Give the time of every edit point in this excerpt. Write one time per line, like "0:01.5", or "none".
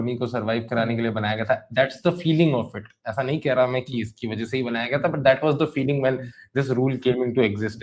none